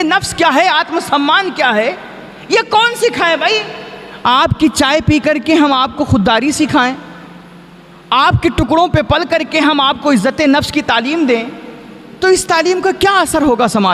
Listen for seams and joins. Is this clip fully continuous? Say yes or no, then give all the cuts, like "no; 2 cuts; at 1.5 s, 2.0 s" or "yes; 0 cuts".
yes; 0 cuts